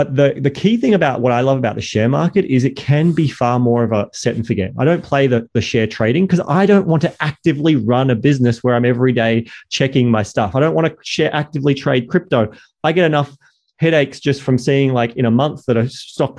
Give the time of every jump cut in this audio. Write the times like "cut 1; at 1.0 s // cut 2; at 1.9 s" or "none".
none

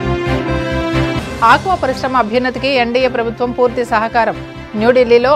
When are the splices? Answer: cut 1; at 0.9 s

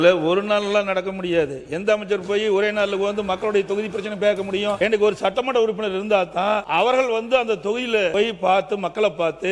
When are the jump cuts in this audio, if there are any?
cut 1; at 4.8 s // cut 2; at 6.7 s // cut 3; at 8.1 s

